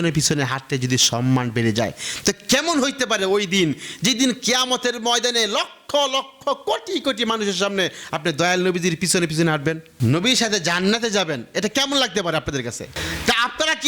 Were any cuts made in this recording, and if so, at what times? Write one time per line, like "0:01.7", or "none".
0:09.9